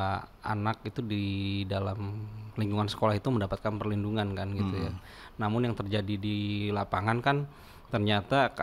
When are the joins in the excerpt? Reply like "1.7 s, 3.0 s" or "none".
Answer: none